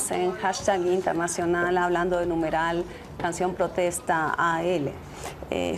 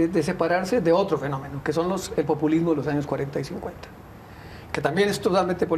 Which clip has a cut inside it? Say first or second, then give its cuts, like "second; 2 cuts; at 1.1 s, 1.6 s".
first; 1 cut; at 2.3 s